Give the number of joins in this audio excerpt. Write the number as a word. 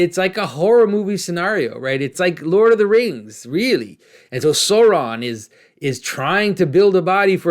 one